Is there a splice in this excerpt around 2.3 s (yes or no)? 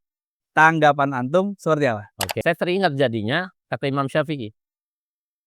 yes